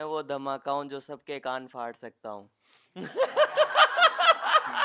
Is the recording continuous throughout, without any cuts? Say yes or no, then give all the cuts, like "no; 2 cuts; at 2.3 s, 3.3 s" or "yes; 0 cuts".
yes; 0 cuts